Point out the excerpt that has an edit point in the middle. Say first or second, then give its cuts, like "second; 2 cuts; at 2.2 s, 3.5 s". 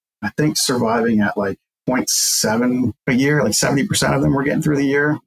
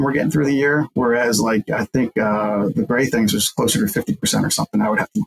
first; 2 cuts; at 1.8 s, 3.0 s